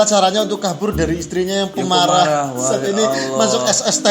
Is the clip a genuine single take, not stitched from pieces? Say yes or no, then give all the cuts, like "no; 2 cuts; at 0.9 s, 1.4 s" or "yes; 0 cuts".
yes; 0 cuts